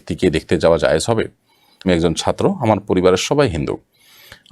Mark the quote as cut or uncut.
cut